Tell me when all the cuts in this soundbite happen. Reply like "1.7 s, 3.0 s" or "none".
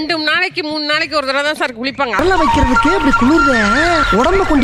2.2 s